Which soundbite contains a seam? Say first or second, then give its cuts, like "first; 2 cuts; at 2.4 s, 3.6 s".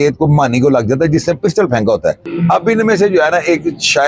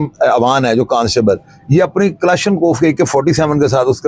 first; 1 cut; at 2.3 s